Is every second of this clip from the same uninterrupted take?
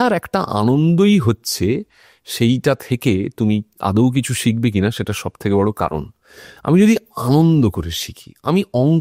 yes; 0 cuts

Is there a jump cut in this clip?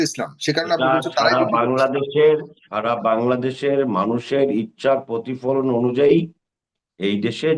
no; 0 cuts

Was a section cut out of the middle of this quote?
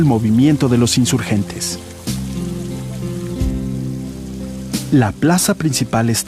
yes; 1 cut; at 2.8 s

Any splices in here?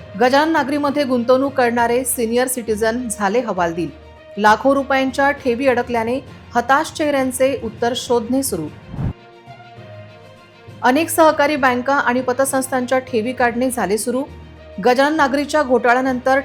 no; 0 cuts

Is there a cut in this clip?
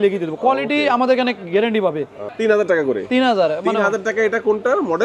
yes; 1 cut; at 2.3 s

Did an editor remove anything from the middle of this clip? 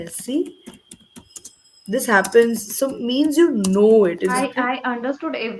yes; 1 cut; at 4.4 s

